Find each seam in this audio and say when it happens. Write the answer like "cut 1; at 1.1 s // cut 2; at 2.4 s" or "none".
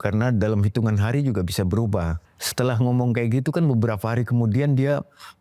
cut 1; at 2.3 s